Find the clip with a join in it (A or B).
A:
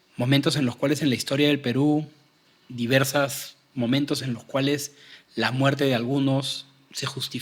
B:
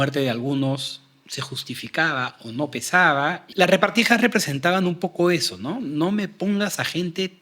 B